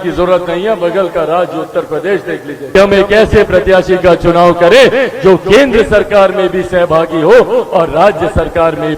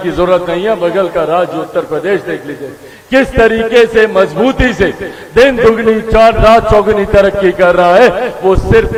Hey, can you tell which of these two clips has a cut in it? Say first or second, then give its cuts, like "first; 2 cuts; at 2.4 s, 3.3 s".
first; 1 cut; at 2.7 s